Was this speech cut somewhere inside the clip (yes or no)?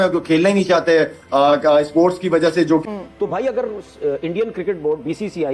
yes